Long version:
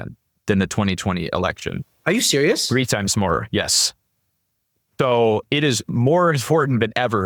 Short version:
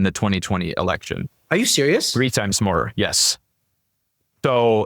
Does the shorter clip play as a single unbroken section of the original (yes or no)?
yes